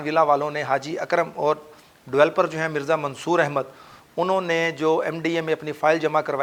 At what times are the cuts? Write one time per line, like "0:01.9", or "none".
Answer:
none